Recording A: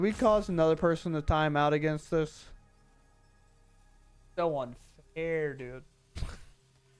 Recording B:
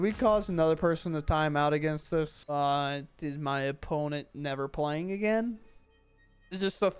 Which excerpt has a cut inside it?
B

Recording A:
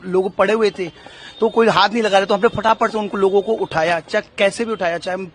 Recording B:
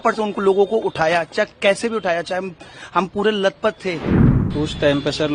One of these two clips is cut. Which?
B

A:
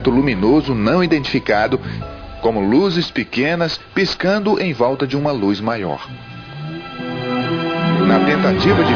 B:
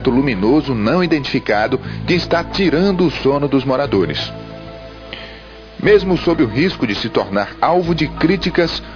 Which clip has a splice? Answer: B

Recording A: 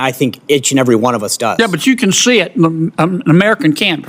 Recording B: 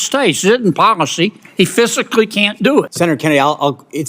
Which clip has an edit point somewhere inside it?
B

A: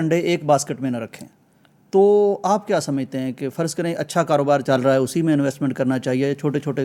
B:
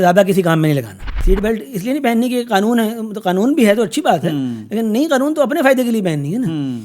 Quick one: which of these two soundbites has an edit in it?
B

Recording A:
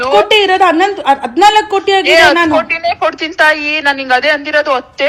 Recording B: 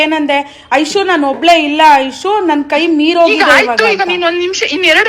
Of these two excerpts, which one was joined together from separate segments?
B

